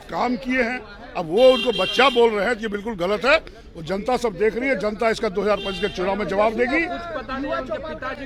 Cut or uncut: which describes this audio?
uncut